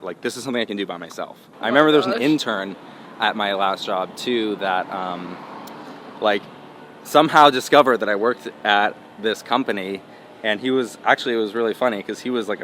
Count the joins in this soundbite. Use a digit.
1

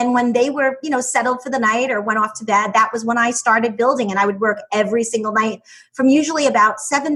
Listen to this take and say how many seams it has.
0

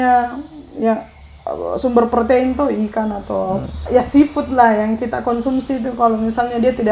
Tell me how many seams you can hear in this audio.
1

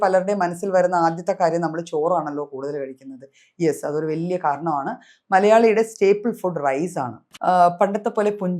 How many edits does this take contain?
1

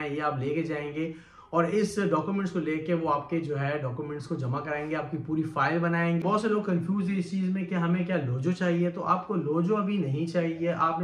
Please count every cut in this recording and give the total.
1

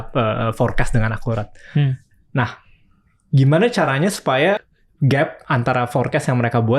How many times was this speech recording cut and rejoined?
1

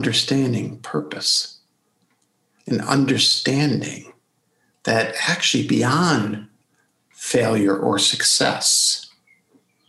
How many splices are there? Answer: 0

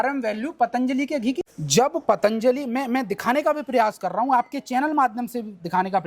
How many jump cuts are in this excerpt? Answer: 1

